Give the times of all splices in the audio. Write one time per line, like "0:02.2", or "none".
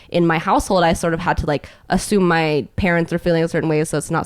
none